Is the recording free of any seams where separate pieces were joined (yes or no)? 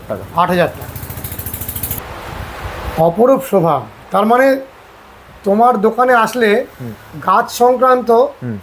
no